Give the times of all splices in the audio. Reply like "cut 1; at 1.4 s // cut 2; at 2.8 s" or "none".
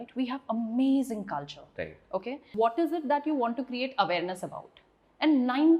cut 1; at 2.4 s